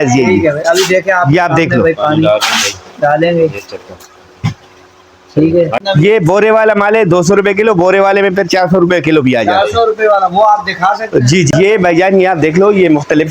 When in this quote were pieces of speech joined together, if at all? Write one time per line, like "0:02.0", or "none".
0:05.8
0:11.5